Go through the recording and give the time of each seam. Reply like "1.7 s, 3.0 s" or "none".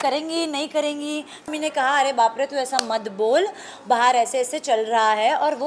1.5 s